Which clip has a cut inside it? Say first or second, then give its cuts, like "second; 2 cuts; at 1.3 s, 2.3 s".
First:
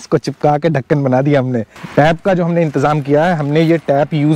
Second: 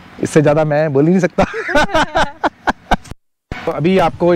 first; 1 cut; at 1.8 s